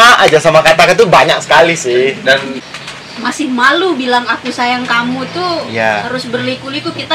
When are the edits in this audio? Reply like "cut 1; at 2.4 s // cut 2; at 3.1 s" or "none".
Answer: cut 1; at 2.5 s // cut 2; at 6.0 s